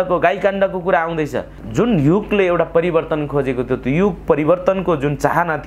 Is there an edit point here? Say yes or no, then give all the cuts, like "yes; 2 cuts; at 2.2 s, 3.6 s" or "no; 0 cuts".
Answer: yes; 1 cut; at 1.6 s